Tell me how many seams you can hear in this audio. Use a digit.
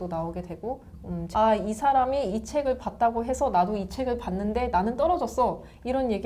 1